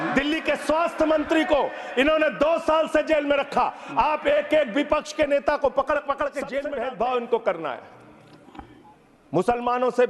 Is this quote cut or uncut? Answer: cut